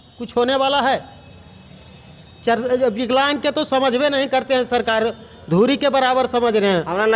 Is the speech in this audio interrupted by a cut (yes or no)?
no